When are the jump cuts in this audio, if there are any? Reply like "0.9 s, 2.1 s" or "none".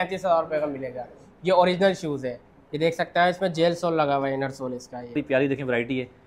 5.2 s

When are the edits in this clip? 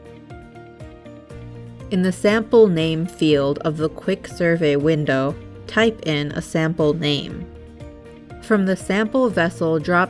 1.5 s

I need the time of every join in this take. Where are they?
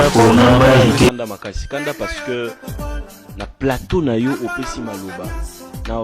1.2 s

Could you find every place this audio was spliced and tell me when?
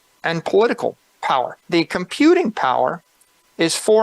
1.6 s

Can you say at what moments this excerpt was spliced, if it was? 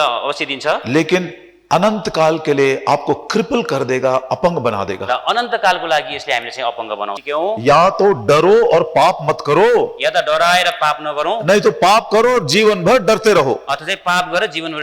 7.1 s

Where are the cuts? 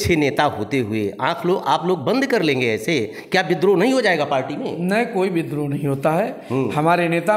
none

